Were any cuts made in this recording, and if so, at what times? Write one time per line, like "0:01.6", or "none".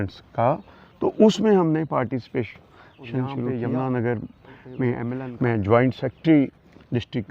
0:03.5
0:05.2